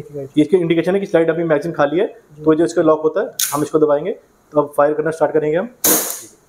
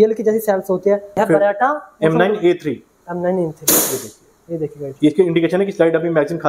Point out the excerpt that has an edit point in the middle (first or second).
second